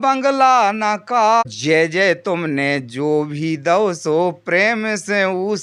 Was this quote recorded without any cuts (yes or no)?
no